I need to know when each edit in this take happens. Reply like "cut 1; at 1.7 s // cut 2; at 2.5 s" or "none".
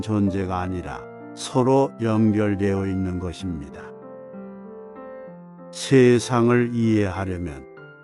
cut 1; at 3.6 s // cut 2; at 5.3 s